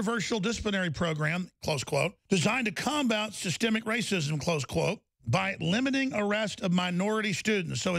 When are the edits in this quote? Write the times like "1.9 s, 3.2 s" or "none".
2.2 s